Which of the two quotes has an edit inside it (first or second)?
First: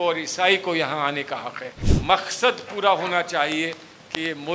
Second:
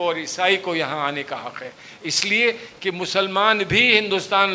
first